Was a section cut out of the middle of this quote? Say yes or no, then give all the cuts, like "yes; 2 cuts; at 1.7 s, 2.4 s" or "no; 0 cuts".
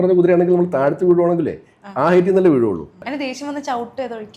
yes; 1 cut; at 3.1 s